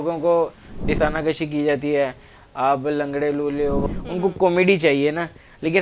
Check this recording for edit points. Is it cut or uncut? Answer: cut